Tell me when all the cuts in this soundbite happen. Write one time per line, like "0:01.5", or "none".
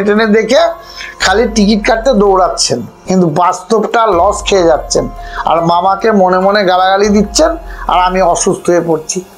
0:02.9

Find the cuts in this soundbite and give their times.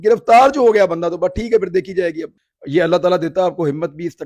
0:02.3

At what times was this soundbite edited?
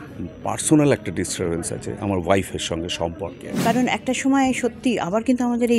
0:03.4

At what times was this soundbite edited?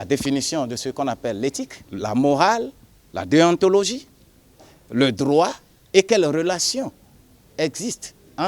0:01.8

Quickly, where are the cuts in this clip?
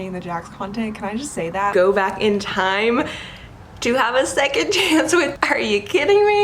0:01.7
0:05.4

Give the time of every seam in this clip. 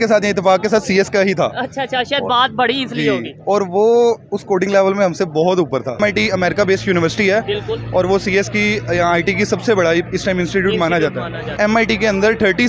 0:06.0
0:11.6

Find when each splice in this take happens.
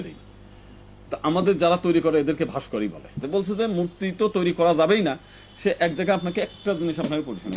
0:03.2

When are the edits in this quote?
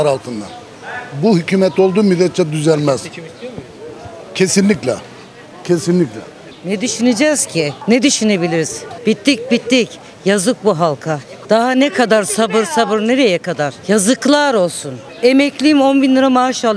none

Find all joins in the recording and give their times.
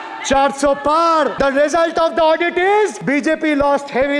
0:01.3
0:03.0

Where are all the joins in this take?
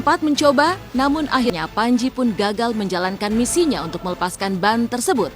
0:01.5

